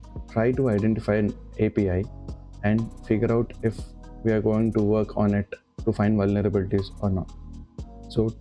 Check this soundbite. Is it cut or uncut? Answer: uncut